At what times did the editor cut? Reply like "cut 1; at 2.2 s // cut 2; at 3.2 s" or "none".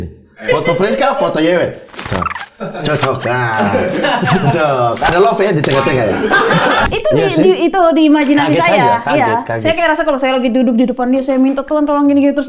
cut 1; at 6.9 s